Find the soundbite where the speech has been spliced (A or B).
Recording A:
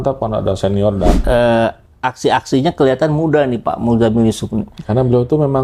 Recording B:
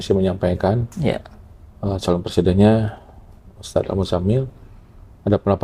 A